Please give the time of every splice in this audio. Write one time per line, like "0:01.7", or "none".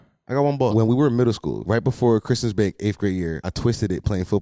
0:00.7
0:01.6
0:03.5